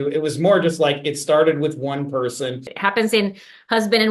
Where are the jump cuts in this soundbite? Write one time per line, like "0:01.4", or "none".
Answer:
0:02.7